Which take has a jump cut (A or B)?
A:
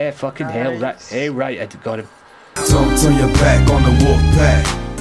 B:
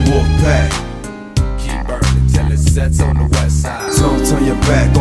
A